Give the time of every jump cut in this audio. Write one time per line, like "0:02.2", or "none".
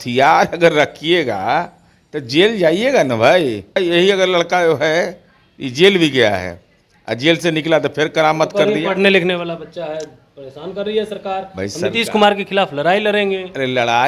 0:03.8